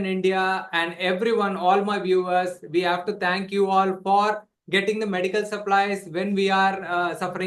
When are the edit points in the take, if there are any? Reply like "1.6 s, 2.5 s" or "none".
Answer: none